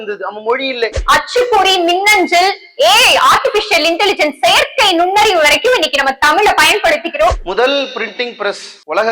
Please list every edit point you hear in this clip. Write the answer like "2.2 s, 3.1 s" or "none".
1.0 s, 7.4 s